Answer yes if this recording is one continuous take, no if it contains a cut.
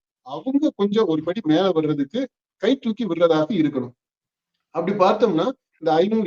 yes